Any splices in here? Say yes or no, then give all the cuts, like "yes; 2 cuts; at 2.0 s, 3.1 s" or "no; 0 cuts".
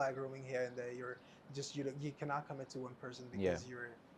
no; 0 cuts